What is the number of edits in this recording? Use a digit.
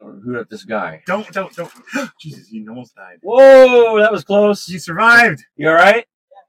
1